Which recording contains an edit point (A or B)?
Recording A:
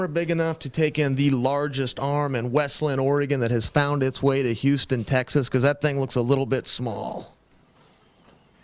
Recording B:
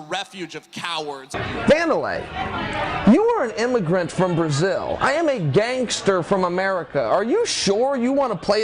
B